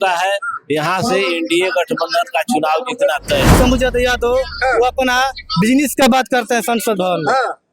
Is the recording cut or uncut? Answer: cut